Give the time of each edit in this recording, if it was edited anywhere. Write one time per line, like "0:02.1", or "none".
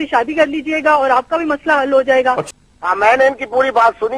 0:02.4